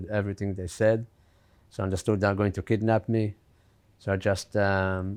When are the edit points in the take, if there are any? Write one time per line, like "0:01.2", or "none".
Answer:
none